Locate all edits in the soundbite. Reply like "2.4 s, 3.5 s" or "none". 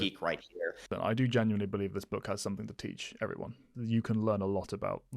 0.9 s, 3.7 s